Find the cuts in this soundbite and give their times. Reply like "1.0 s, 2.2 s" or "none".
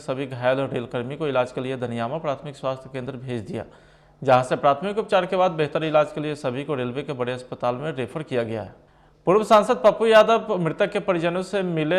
9.1 s

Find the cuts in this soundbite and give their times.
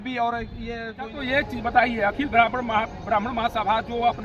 1.1 s

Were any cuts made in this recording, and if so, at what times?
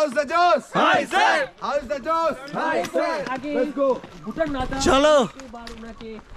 none

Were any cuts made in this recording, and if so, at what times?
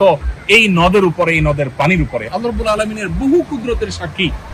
none

